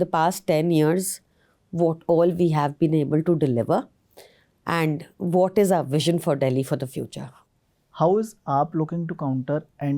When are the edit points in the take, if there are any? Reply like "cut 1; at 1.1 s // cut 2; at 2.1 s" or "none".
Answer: none